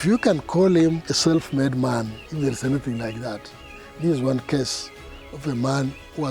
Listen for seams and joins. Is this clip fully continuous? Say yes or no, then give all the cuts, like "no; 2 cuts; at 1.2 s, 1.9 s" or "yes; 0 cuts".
no; 2 cuts; at 1.1 s, 2.2 s